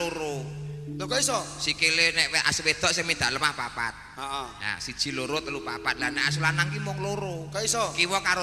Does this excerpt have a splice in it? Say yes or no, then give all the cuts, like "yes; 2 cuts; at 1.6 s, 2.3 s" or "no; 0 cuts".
no; 0 cuts